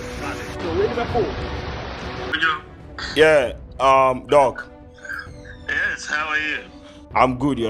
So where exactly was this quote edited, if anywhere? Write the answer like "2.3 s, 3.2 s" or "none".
2.3 s